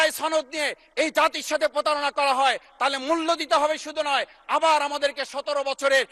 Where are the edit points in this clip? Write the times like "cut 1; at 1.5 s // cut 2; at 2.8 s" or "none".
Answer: none